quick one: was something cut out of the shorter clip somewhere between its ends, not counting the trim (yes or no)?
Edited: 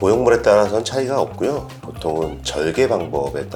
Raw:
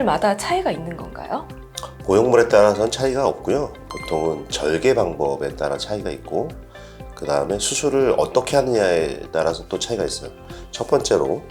no